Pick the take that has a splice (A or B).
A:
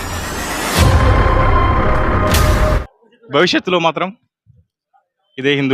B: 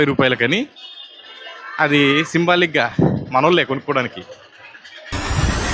A